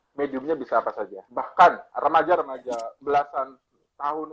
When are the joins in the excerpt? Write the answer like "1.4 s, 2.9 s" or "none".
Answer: 1.2 s, 1.9 s